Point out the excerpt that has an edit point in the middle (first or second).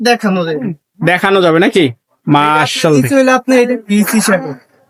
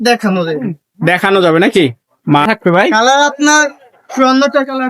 second